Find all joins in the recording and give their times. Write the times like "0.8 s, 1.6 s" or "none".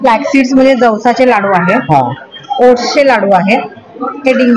none